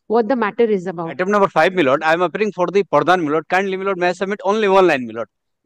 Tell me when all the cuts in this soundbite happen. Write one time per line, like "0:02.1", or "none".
0:01.2